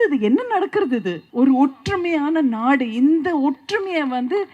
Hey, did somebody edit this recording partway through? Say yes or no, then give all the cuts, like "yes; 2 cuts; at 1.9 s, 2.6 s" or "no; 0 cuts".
yes; 1 cut; at 1.2 s